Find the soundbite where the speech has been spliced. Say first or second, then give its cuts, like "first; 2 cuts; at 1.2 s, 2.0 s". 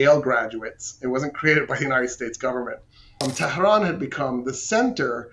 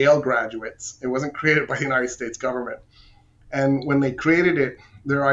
first; 1 cut; at 3.2 s